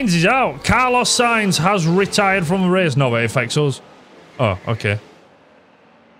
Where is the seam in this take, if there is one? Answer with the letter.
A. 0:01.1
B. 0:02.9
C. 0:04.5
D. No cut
D